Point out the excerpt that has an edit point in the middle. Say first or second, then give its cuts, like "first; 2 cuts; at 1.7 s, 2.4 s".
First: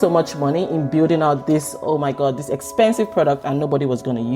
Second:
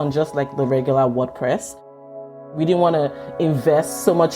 second; 1 cut; at 2.0 s